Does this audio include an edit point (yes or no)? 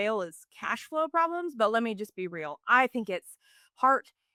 no